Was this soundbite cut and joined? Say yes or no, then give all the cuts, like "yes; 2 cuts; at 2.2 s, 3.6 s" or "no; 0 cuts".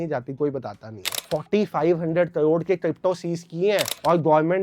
yes; 1 cut; at 1.2 s